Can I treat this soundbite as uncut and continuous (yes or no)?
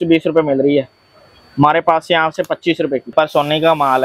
no